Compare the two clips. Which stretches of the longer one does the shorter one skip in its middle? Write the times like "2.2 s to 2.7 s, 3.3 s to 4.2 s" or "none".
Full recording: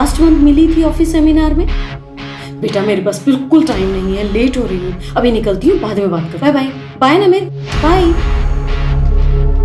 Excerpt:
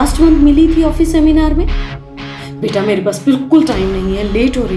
none